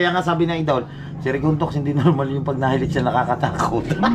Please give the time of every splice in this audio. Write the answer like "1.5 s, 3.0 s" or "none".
none